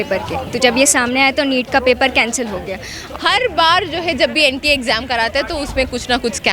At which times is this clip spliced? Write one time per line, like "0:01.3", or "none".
0:03.0